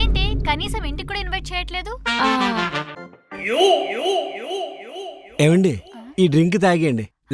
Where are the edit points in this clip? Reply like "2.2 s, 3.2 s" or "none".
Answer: 2.9 s